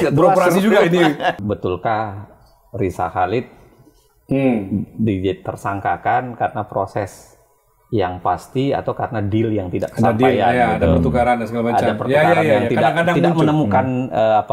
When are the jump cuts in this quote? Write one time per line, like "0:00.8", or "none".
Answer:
0:01.4

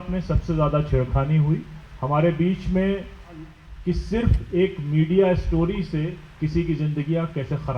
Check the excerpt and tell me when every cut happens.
0:03.7

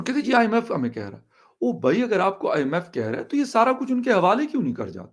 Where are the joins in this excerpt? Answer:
none

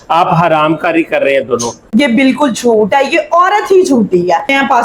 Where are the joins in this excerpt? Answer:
0:01.8

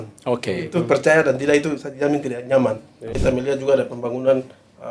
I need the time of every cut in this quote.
0:03.2

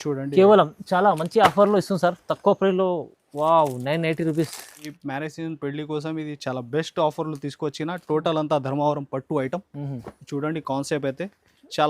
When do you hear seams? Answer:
0:04.9

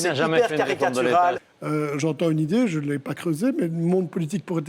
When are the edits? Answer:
0:01.4

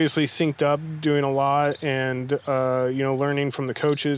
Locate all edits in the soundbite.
none

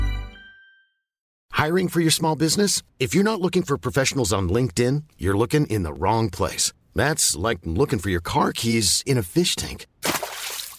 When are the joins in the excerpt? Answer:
none

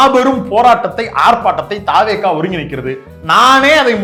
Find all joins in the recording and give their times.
none

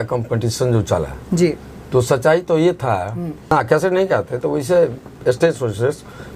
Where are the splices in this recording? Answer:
0:03.5

